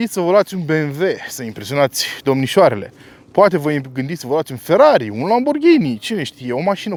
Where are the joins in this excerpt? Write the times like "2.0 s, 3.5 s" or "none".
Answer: none